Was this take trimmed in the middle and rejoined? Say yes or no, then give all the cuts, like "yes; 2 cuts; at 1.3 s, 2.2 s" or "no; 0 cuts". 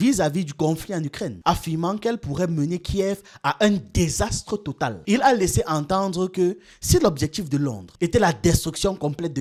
no; 0 cuts